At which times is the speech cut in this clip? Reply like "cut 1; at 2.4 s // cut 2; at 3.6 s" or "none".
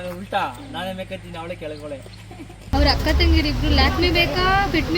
cut 1; at 2.6 s